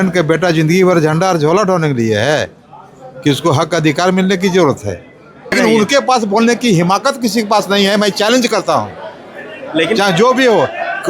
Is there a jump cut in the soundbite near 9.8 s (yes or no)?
no